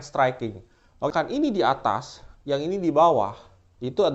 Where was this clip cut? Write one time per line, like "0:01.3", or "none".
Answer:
0:01.1